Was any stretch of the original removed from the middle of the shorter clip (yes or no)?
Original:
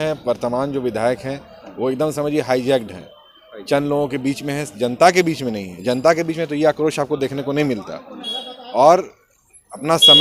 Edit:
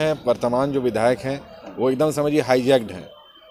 no